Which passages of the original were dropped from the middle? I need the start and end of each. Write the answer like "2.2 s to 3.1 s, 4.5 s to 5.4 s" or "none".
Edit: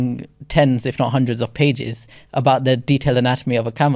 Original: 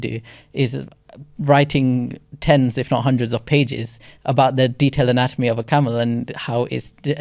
none